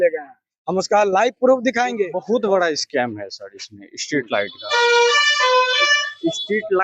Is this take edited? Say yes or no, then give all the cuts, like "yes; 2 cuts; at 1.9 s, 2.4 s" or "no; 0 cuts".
yes; 1 cut; at 2.2 s